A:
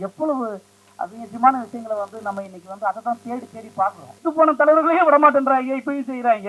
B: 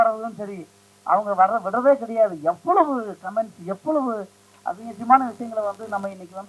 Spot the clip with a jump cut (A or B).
A